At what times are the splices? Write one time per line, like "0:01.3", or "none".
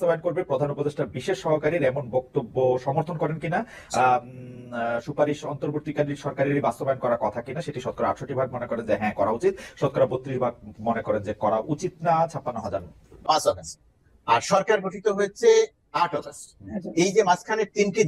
0:13.1